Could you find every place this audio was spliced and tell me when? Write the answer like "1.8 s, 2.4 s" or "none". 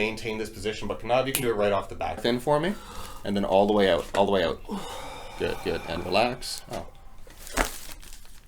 2.2 s